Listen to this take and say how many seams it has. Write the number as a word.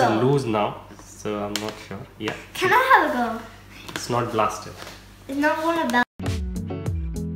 one